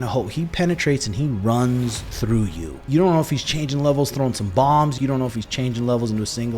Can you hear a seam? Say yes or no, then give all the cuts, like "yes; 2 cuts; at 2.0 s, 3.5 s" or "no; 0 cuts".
yes; 2 cuts; at 2.8 s, 5.0 s